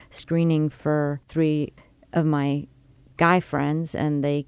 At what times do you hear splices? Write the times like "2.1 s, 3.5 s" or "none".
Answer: 1.6 s